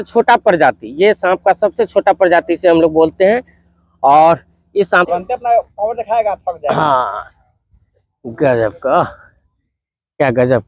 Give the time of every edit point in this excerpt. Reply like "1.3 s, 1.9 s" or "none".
5.1 s